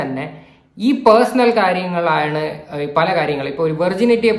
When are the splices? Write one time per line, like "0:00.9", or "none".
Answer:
none